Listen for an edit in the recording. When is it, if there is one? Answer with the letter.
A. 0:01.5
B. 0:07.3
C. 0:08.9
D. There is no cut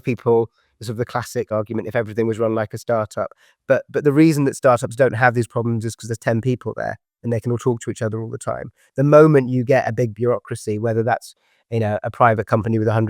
A